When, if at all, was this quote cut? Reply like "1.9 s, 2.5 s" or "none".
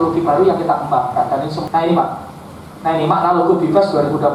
1.6 s